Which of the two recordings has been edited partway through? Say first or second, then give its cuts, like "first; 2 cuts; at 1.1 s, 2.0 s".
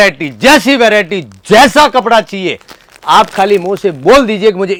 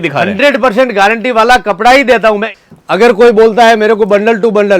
second; 1 cut; at 2.5 s